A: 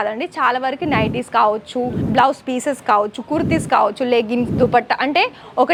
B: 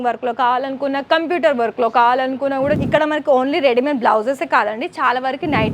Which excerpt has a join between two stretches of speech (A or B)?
B